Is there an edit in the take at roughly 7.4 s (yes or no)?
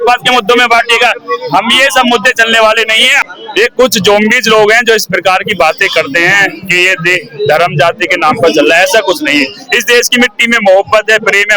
no